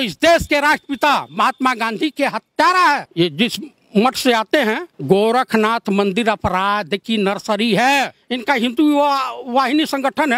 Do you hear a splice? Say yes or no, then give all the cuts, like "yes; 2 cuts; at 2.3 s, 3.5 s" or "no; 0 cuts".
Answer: yes; 3 cuts; at 3.1 s, 4.9 s, 8.2 s